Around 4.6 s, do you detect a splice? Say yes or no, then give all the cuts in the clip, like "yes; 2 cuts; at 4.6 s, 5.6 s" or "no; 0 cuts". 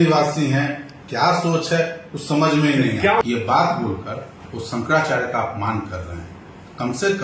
no; 1 cut; at 3.2 s